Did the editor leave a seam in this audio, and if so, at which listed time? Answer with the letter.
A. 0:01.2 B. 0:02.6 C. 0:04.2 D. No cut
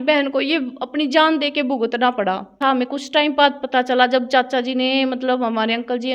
B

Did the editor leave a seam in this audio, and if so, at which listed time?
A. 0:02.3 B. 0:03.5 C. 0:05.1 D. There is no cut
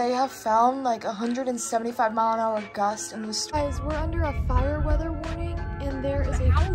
B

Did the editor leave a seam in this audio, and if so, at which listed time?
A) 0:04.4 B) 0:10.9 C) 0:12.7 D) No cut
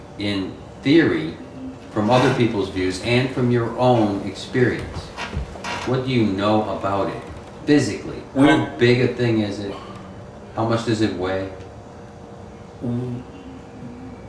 A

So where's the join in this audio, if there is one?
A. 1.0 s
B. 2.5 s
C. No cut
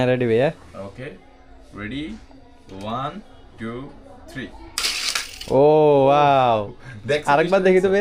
C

